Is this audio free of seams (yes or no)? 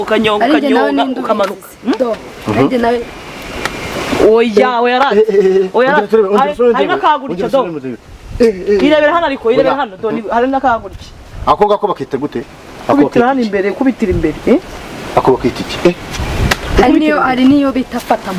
yes